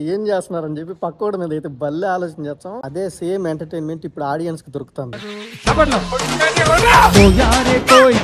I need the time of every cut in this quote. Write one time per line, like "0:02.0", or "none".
0:02.8
0:05.3